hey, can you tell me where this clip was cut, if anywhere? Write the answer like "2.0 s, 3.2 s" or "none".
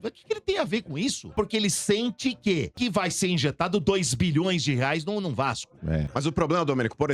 1.3 s, 2.8 s, 6.1 s